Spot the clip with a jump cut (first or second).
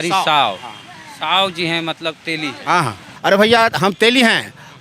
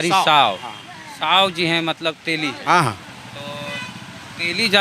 first